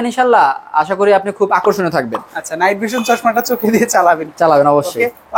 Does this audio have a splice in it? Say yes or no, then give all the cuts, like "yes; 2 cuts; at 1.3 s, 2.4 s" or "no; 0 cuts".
no; 0 cuts